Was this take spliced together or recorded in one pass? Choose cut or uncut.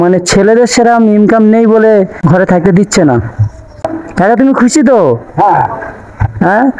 cut